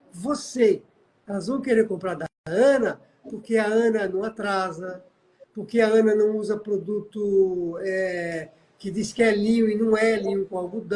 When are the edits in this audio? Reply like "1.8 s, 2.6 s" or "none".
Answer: none